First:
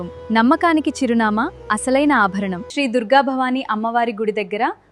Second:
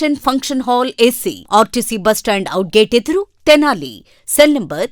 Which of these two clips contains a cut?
first; 1 cut; at 2.6 s

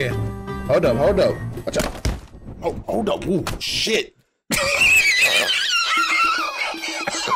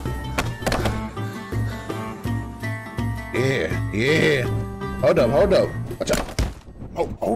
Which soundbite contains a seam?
second; 1 cut; at 2.9 s

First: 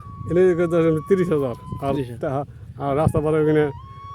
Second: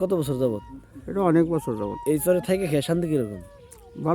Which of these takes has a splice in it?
second; 1 cut; at 2.2 s

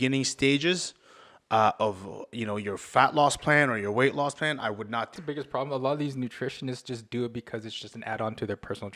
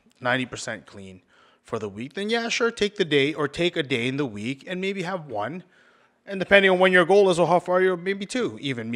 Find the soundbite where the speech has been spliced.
first; 1 cut; at 5.2 s

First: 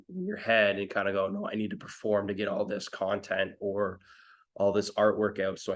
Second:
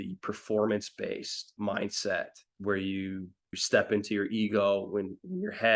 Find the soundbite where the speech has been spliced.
second; 3 cuts; at 1.5 s, 2.5 s, 3.6 s

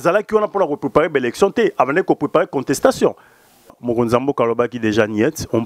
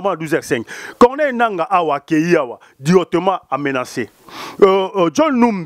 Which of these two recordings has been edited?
first; 1 cut; at 3.8 s

